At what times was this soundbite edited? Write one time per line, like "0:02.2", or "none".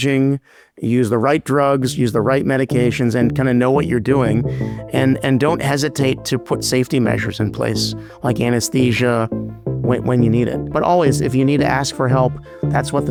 none